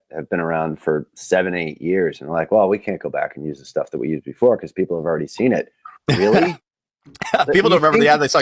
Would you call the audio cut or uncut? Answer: uncut